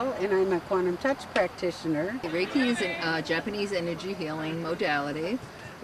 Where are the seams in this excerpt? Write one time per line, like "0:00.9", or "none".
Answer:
0:02.2